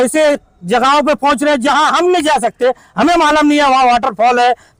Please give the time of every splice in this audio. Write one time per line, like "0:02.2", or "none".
none